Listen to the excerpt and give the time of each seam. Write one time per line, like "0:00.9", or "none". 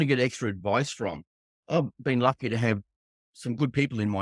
0:01.6